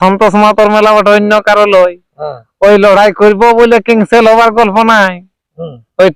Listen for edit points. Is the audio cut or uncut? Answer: uncut